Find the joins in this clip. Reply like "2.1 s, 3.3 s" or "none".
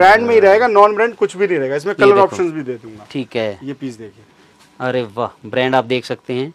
none